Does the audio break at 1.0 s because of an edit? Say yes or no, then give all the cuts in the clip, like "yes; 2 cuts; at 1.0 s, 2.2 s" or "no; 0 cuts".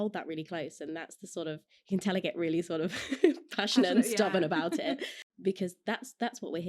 no; 1 cut; at 5.3 s